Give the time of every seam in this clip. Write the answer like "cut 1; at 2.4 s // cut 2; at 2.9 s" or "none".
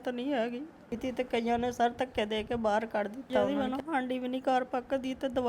cut 1; at 1.0 s // cut 2; at 3.4 s